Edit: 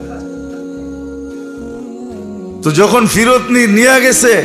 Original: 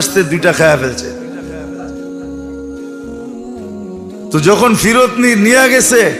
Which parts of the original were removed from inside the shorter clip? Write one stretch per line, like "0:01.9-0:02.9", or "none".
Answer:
0:04.1-0:04.3